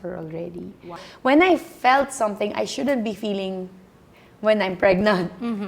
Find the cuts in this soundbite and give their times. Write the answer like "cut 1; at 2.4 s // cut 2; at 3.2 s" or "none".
cut 1; at 1.0 s